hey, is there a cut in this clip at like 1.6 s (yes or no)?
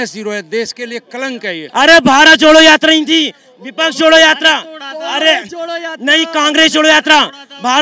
yes